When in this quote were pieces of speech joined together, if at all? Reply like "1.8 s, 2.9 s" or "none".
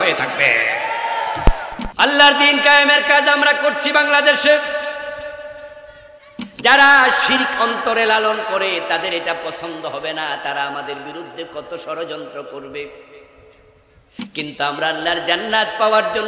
1.7 s